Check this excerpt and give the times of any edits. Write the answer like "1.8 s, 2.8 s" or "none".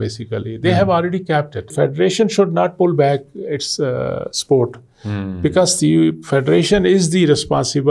1.7 s